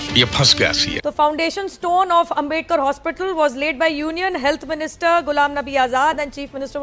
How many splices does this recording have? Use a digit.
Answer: 1